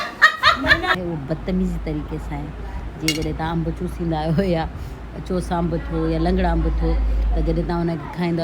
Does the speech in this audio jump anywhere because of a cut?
yes; 1 cut; at 0.9 s

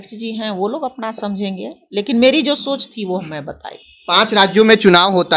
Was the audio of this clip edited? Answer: no; 0 cuts

